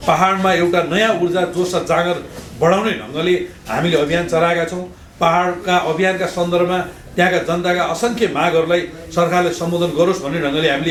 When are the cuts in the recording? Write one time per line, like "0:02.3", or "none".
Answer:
none